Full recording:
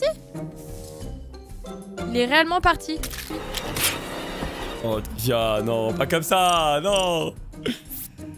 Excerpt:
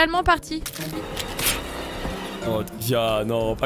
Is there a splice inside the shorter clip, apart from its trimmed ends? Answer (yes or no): no